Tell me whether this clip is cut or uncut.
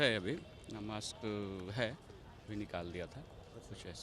uncut